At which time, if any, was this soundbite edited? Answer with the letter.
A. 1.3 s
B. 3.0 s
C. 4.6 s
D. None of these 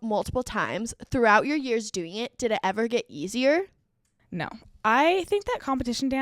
C